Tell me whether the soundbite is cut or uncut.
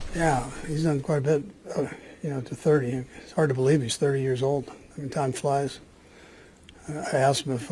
uncut